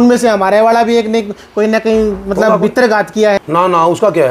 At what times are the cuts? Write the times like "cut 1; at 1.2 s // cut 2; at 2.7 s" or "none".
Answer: cut 1; at 3.4 s